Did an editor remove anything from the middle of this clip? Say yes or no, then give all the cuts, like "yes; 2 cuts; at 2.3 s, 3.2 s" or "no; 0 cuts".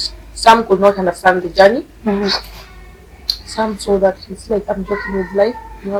no; 0 cuts